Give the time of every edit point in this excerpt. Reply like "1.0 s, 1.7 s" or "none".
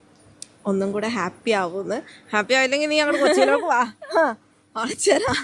none